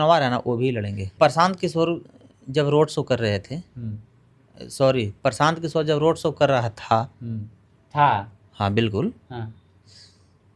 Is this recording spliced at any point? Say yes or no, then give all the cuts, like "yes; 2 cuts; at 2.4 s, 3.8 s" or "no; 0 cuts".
yes; 1 cut; at 1.0 s